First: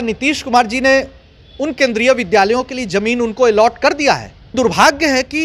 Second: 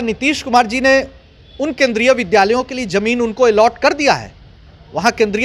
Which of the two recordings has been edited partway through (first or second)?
first